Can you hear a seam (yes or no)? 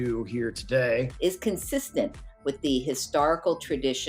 yes